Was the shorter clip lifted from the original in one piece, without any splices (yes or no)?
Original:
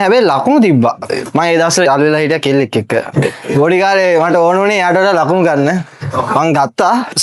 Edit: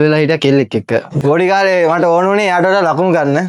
no